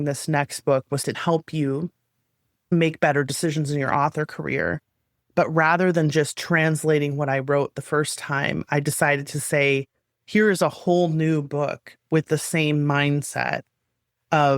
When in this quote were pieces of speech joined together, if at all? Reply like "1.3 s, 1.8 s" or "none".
1.2 s, 2.7 s